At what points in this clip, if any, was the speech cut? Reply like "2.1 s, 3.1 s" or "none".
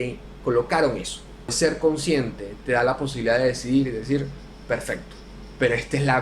1.6 s

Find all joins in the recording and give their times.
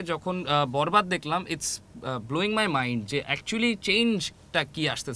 none

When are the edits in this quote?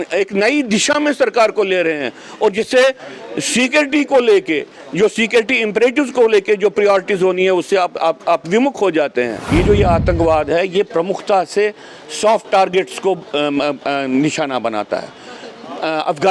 9.4 s

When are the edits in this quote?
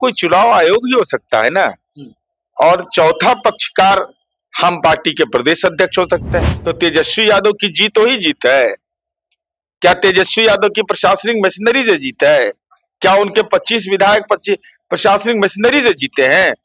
6.5 s

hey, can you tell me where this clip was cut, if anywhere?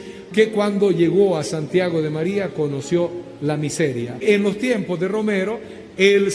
4.2 s

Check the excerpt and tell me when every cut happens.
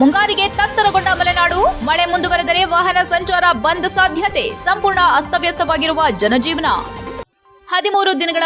none

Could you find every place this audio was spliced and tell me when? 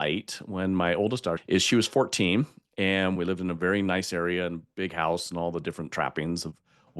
1.4 s, 3.2 s

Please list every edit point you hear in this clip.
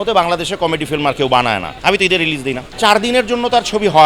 1.7 s, 2.7 s

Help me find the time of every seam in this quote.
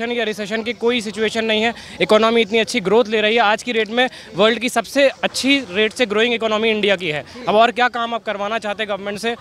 none

